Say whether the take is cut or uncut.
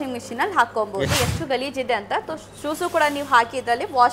cut